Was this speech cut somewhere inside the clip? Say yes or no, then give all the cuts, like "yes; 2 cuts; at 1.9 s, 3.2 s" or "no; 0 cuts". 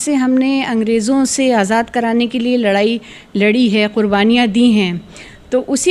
no; 0 cuts